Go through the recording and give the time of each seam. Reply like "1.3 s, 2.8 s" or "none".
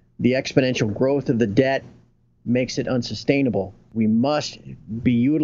3.9 s